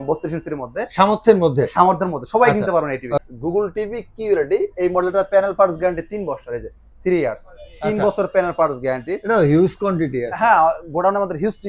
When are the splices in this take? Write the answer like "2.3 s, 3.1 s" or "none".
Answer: 3.2 s